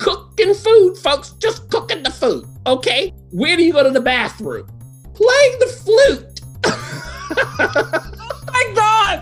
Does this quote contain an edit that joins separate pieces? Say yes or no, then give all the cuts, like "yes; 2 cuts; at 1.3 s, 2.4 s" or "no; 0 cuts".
yes; 1 cut; at 3.2 s